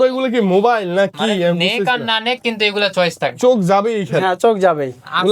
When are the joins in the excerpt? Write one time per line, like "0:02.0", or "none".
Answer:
none